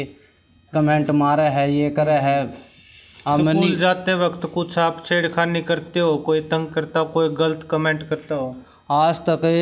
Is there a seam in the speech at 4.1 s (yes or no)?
no